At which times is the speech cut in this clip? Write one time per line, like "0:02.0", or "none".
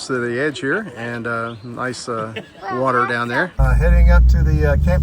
0:03.6

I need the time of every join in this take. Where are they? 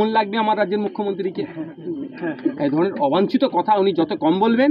none

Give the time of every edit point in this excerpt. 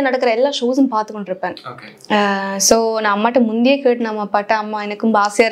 none

